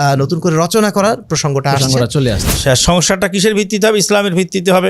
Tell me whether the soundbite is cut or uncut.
cut